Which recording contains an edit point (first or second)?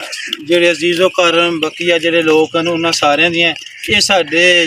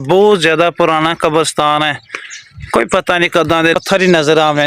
second